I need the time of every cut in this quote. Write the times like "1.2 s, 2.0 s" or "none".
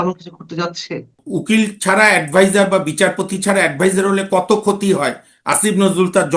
1.2 s